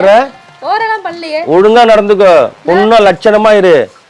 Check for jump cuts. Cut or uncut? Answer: uncut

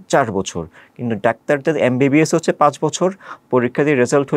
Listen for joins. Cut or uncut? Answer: uncut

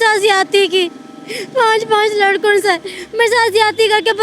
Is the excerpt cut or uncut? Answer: uncut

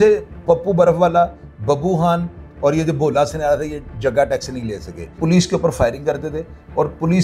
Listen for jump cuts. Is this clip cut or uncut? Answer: cut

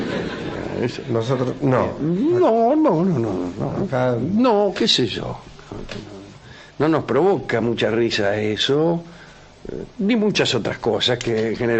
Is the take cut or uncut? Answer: cut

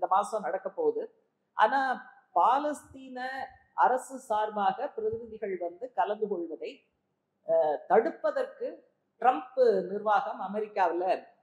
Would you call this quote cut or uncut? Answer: uncut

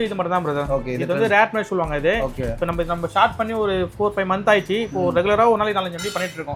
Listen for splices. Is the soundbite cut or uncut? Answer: uncut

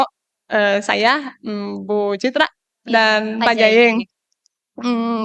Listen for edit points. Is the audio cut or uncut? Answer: uncut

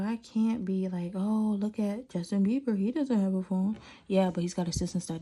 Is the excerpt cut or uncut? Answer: uncut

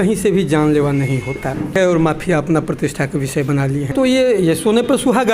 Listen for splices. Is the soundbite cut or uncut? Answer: cut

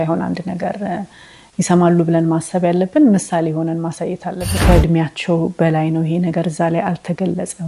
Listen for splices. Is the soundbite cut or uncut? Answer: cut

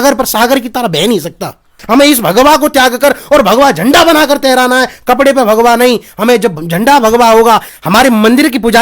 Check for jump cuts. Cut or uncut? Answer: cut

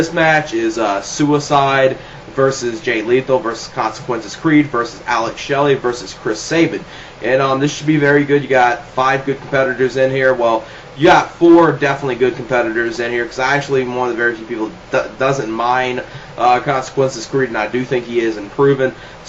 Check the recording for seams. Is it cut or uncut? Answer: uncut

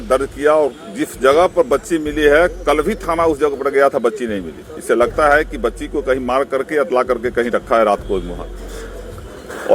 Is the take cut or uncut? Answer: uncut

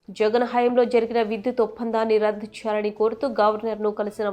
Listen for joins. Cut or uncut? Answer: uncut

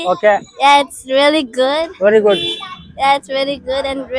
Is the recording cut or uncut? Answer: uncut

